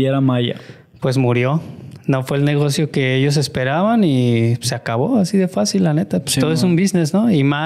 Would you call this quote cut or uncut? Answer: uncut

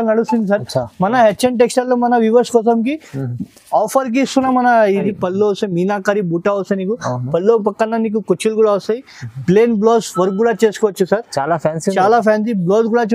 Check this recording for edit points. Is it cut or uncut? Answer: cut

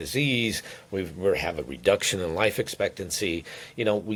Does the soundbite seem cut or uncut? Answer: uncut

